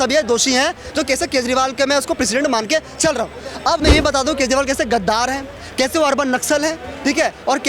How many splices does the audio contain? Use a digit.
1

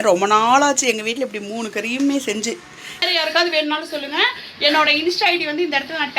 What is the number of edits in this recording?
1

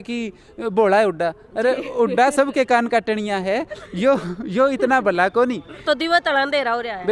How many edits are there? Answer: 1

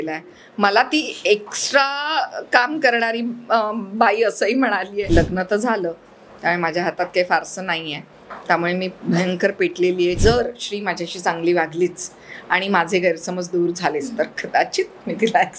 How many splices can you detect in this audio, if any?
2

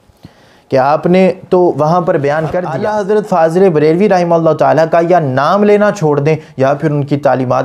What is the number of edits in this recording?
1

